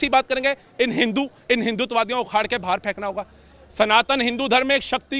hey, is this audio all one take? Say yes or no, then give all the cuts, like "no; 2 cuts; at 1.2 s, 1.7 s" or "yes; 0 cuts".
yes; 0 cuts